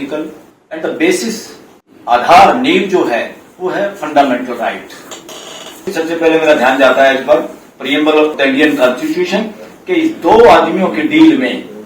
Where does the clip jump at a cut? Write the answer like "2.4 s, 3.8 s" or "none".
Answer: 5.9 s, 8.3 s